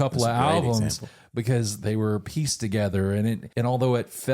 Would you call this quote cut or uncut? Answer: cut